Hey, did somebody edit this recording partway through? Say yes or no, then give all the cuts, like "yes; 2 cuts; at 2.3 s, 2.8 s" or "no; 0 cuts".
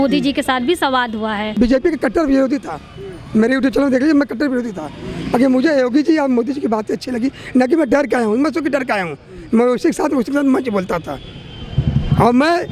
yes; 1 cut; at 1.5 s